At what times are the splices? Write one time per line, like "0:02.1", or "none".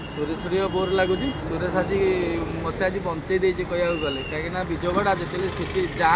none